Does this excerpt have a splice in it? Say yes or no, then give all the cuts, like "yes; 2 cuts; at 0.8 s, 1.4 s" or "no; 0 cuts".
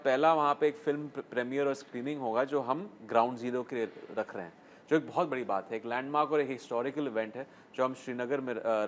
no; 0 cuts